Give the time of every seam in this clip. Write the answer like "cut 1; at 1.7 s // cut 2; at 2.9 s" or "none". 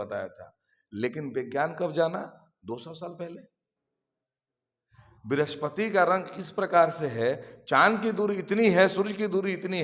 none